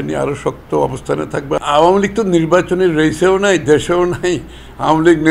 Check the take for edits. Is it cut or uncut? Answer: cut